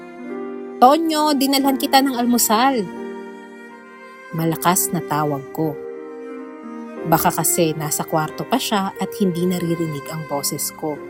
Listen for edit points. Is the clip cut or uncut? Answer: uncut